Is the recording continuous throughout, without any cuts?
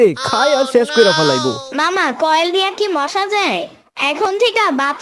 no; 1 cut; at 1.7 s

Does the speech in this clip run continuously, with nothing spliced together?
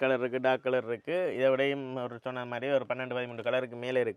yes; 0 cuts

